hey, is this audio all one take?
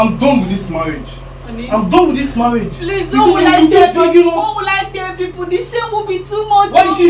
yes; 0 cuts

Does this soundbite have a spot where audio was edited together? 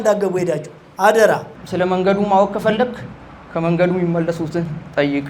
yes; 1 cut; at 1.6 s

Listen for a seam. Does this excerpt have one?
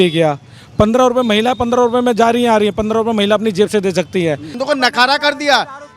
yes; 1 cut; at 4.5 s

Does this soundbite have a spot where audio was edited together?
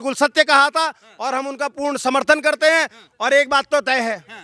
no; 0 cuts

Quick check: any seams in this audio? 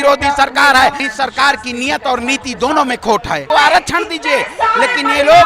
yes; 2 cuts; at 1.0 s, 3.4 s

